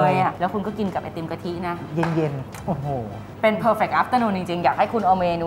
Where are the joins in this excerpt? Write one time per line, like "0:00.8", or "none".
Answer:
none